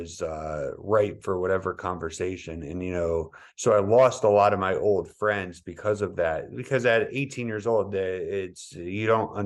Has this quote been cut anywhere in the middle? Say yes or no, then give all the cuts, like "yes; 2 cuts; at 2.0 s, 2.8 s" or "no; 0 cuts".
no; 0 cuts